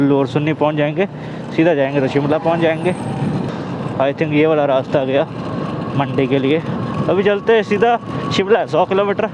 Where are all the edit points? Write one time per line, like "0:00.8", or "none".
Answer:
0:03.5